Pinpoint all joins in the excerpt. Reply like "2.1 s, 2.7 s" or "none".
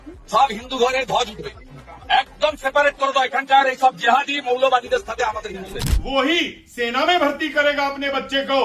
5.9 s